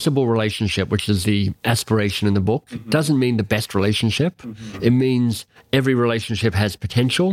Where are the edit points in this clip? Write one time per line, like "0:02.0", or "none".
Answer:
none